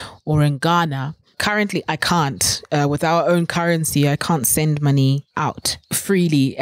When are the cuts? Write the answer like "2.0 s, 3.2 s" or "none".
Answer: 1.4 s, 5.4 s